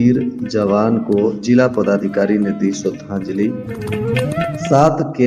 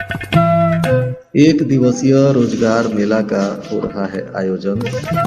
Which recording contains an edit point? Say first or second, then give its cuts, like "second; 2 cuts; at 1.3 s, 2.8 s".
second; 1 cut; at 1.2 s